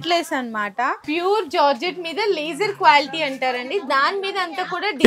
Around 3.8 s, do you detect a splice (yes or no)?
no